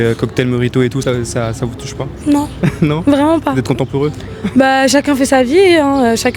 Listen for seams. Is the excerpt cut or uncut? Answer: cut